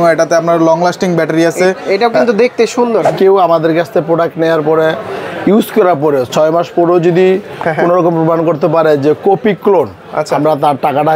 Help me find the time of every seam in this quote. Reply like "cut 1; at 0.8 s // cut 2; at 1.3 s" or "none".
cut 1; at 3.1 s